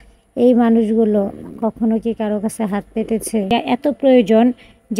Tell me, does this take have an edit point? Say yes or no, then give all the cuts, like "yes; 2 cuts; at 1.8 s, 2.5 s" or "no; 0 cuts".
yes; 1 cut; at 3.5 s